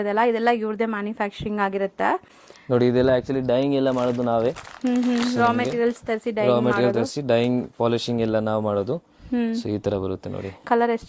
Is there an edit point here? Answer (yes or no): no